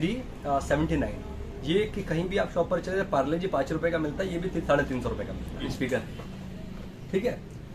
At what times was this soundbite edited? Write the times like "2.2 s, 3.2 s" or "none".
5.7 s